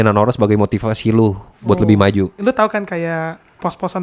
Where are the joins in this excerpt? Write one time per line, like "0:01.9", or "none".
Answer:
0:02.4